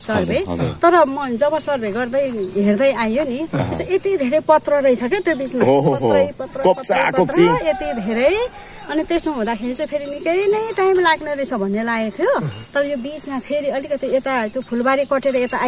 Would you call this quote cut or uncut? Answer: uncut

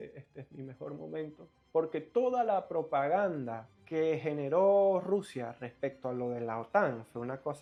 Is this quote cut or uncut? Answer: uncut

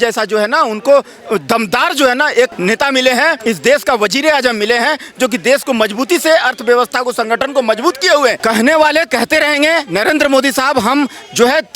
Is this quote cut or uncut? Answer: cut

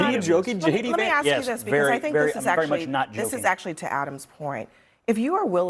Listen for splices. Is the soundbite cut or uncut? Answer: cut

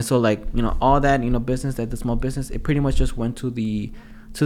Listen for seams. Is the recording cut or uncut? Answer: uncut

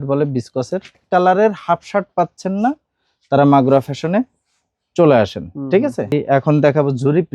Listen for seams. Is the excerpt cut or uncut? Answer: cut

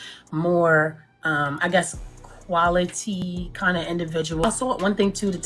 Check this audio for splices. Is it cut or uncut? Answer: cut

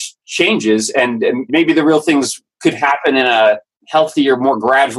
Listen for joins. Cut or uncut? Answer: cut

